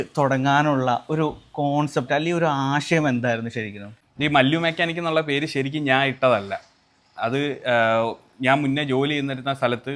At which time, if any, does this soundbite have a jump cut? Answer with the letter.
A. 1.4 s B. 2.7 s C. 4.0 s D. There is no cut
C